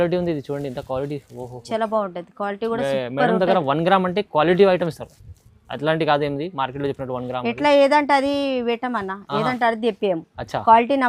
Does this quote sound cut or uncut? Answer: uncut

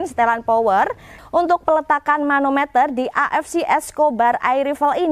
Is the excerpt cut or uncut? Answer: cut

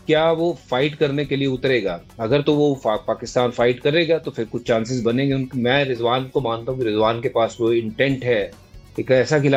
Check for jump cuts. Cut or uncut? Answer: uncut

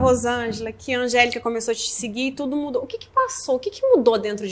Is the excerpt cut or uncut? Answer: uncut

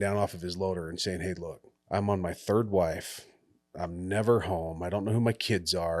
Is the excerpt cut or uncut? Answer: cut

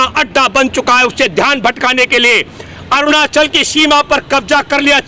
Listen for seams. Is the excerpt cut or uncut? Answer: uncut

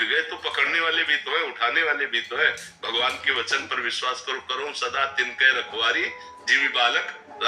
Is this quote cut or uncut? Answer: uncut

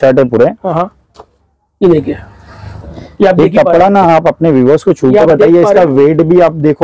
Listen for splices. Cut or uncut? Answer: uncut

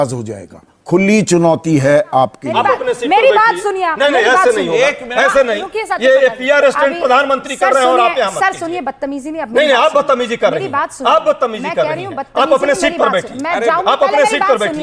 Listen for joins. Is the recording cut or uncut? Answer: cut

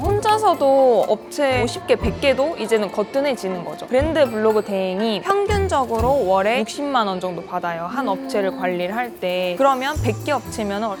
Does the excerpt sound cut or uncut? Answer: uncut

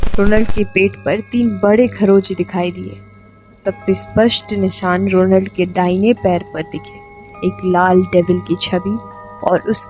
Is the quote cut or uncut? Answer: uncut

